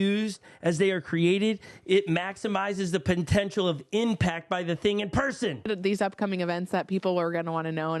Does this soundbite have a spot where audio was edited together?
yes; 1 cut; at 5.7 s

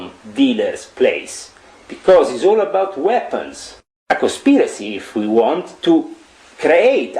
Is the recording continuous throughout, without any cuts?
no; 1 cut; at 3.9 s

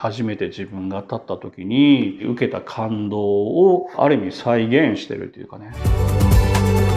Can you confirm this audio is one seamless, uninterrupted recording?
no; 2 cuts; at 2.2 s, 5.9 s

